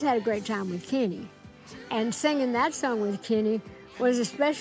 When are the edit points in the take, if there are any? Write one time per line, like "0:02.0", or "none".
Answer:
0:01.4